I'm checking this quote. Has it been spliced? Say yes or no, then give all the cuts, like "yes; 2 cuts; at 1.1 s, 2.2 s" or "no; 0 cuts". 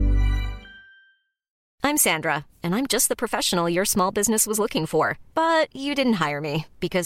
yes; 1 cut; at 1.6 s